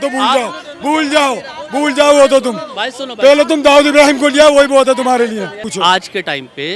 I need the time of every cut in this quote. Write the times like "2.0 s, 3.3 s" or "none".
5.6 s